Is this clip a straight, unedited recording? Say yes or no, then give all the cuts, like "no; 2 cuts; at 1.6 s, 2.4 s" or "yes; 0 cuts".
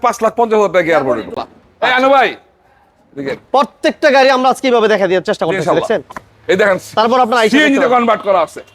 no; 1 cut; at 1.4 s